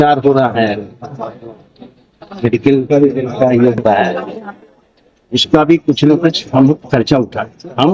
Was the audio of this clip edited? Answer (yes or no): no